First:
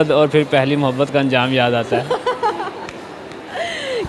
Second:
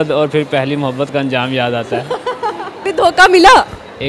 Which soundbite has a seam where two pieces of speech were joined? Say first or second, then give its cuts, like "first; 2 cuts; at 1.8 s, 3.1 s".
second; 1 cut; at 2.8 s